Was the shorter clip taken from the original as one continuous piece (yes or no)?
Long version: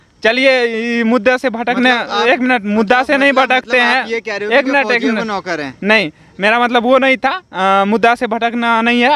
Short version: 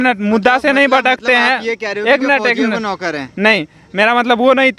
yes